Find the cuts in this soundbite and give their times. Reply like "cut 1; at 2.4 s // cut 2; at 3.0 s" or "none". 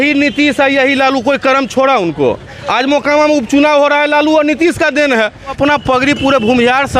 cut 1; at 2.6 s // cut 2; at 5.5 s